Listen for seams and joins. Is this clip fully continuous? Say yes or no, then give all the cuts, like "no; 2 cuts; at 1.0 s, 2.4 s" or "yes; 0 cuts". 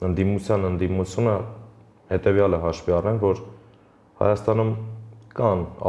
yes; 0 cuts